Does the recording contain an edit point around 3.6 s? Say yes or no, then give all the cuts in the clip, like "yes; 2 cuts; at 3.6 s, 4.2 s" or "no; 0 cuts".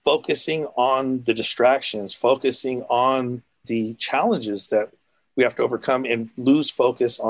yes; 1 cut; at 3.6 s